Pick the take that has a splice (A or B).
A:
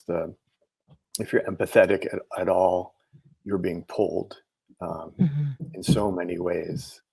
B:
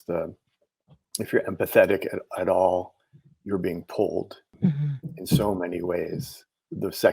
B